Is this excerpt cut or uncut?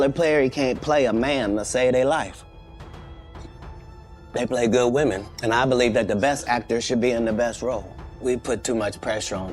cut